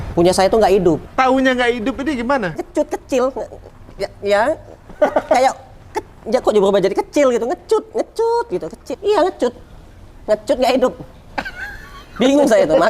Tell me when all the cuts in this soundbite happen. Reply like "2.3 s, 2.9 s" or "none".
1.1 s, 2.6 s, 8.9 s